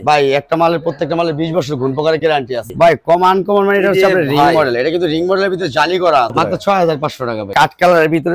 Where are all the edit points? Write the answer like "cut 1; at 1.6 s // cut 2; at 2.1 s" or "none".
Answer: cut 1; at 2.7 s // cut 2; at 6.3 s // cut 3; at 7.5 s